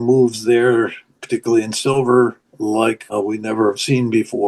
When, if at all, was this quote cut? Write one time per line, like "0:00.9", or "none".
0:03.1